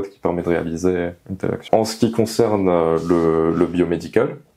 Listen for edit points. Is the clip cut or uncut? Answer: uncut